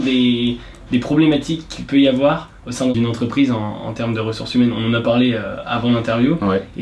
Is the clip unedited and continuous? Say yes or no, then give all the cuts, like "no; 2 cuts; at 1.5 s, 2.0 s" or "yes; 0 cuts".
no; 1 cut; at 2.9 s